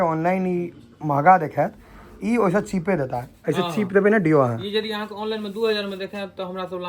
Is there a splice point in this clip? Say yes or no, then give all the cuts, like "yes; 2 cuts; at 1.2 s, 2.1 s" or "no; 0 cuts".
no; 0 cuts